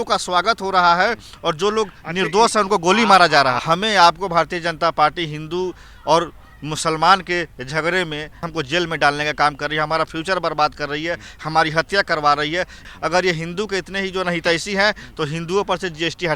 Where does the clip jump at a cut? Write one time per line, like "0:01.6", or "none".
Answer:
0:03.6
0:08.4
0:12.9